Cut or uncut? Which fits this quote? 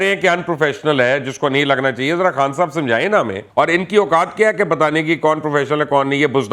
cut